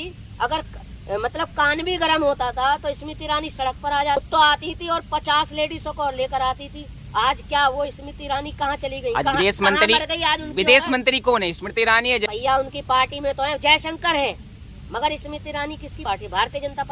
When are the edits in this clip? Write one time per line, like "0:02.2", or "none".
0:04.2
0:12.2
0:15.9